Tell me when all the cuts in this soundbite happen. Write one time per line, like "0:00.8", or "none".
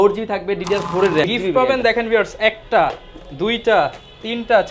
0:01.3